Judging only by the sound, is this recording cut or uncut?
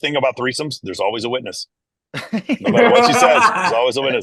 uncut